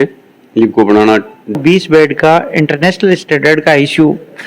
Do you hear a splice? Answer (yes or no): yes